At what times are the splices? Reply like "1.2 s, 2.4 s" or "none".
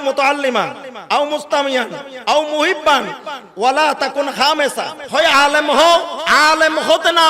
5.0 s, 6.2 s